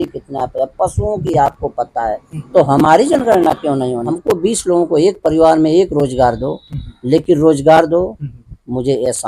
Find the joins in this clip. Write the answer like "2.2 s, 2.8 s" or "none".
4.1 s